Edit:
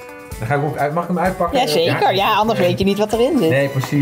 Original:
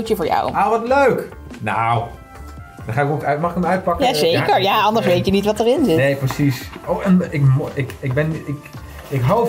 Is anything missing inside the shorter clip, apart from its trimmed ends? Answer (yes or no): no